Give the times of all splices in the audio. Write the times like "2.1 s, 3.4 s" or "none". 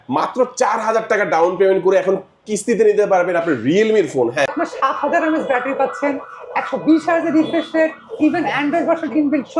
4.5 s